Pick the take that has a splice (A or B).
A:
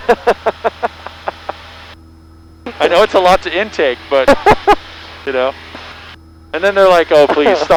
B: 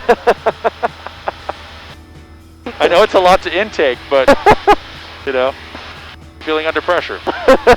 B